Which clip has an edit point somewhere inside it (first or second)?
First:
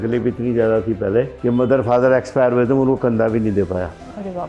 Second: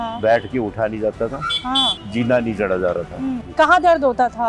second